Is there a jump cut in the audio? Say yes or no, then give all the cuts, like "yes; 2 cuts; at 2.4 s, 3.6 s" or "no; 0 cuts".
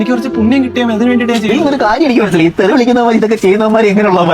yes; 1 cut; at 1.5 s